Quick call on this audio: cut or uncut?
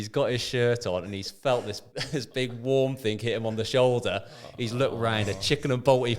cut